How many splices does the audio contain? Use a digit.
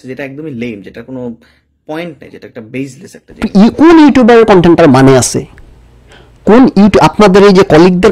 0